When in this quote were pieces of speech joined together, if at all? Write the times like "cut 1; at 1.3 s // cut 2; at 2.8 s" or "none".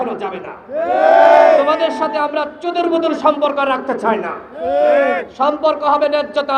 none